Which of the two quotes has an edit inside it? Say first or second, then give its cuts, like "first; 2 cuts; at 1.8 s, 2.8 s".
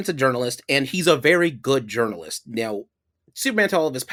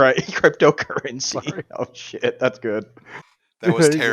second; 1 cut; at 3.0 s